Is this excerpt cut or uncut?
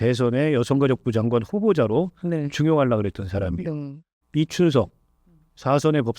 cut